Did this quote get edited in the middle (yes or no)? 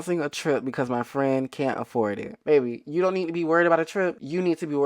yes